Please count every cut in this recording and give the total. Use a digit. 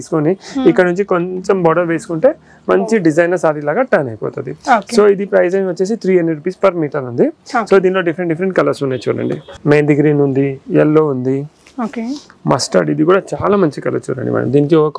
0